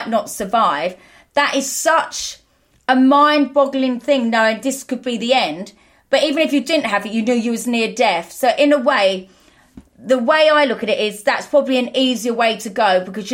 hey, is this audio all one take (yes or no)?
yes